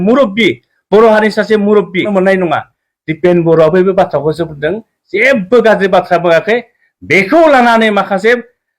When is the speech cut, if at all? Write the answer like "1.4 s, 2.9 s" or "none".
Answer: 2.1 s